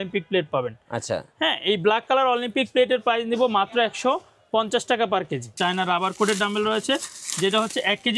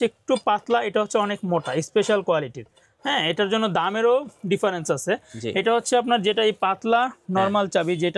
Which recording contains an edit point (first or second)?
first